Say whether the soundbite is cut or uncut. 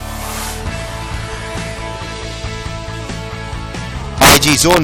cut